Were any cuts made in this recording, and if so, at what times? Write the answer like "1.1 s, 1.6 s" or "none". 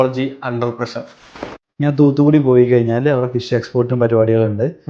1.6 s